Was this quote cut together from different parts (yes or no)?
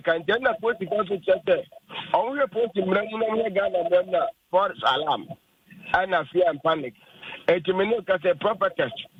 no